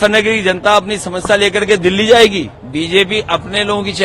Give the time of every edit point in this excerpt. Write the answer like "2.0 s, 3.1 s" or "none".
2.6 s